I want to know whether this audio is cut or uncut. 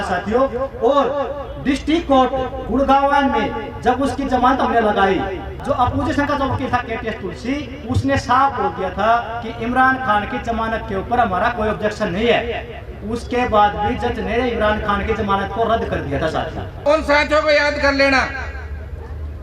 cut